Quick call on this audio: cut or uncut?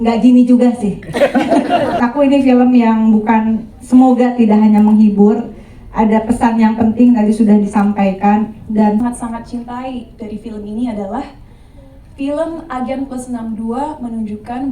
cut